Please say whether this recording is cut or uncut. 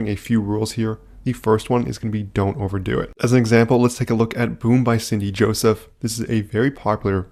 uncut